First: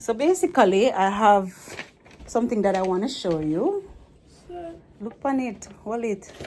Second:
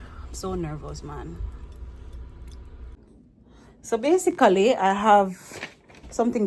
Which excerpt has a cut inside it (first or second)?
second